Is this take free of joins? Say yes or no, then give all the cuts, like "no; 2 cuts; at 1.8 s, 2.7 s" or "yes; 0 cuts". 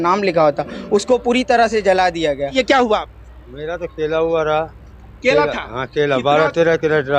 no; 1 cut; at 2.5 s